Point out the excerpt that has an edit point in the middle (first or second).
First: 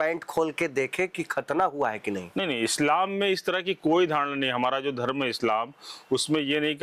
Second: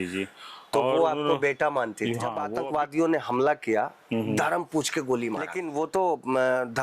second